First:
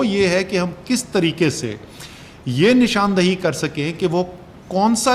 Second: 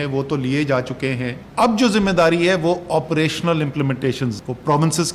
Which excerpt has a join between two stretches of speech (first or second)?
second